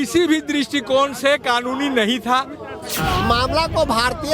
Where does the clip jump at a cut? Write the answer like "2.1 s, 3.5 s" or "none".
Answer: 2.9 s